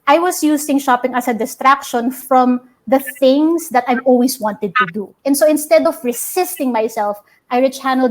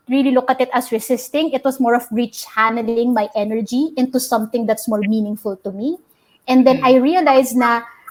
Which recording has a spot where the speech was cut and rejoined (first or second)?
first